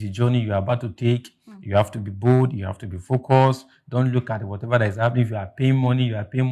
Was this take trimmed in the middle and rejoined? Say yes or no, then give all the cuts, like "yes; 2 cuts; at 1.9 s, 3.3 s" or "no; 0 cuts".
no; 0 cuts